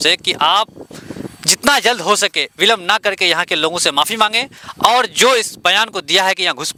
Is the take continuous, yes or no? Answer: yes